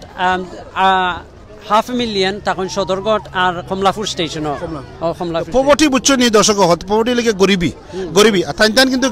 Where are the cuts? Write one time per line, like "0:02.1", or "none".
none